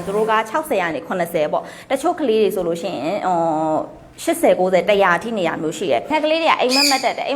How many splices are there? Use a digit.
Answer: 1